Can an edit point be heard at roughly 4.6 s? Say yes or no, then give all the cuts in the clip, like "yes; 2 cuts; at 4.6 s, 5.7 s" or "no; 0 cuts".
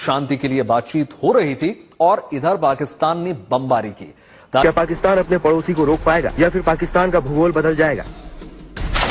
yes; 1 cut; at 4.6 s